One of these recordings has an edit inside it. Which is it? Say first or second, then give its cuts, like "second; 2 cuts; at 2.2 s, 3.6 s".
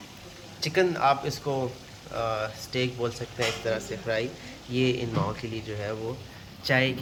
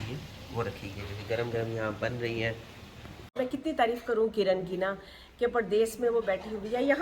second; 1 cut; at 3.3 s